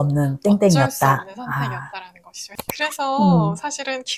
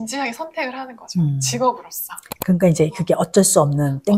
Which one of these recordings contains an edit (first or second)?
first